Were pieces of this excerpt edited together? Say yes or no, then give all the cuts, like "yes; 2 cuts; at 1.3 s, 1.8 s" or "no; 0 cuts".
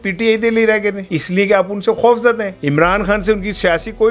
yes; 2 cuts; at 1.1 s, 2.5 s